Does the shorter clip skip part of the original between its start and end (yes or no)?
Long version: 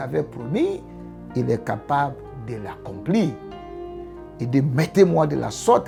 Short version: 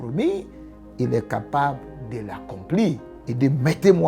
yes